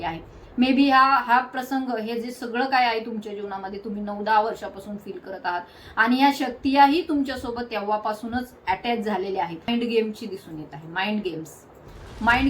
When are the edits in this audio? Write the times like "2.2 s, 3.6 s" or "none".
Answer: 9.7 s